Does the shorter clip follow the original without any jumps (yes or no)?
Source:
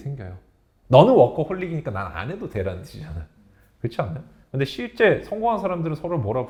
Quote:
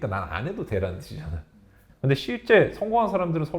no